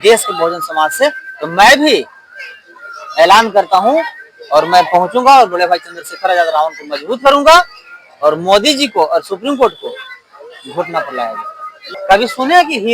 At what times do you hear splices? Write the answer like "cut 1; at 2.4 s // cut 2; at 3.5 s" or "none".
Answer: cut 1; at 11.9 s